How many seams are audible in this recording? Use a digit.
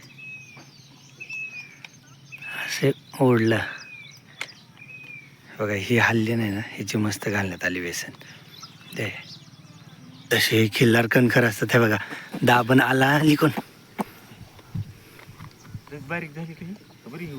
1